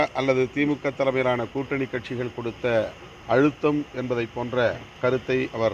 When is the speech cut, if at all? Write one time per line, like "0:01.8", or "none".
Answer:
0:03.1
0:04.9